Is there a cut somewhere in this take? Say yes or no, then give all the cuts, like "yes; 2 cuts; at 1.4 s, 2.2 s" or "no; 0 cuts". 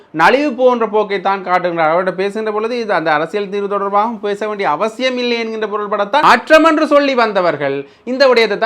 yes; 1 cut; at 6.2 s